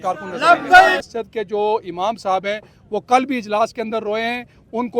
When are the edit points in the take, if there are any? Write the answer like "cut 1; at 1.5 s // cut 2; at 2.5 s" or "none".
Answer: cut 1; at 1.0 s